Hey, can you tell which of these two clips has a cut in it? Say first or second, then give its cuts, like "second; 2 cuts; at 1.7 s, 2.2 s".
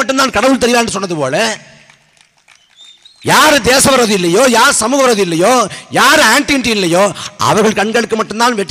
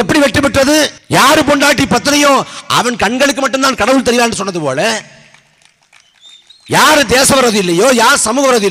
second; 1 cut; at 1.0 s